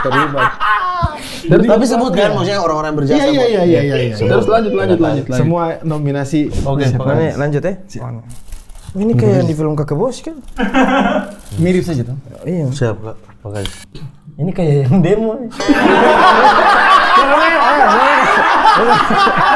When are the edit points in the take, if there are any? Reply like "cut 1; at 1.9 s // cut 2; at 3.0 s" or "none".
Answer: cut 1; at 6.5 s